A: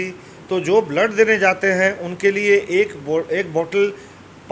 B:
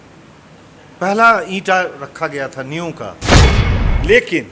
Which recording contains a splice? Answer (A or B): B